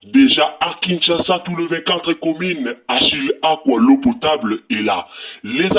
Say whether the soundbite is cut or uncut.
uncut